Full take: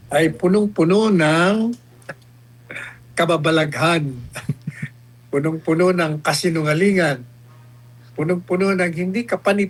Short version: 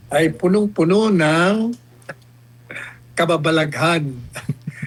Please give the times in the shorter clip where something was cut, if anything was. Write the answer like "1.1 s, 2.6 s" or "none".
none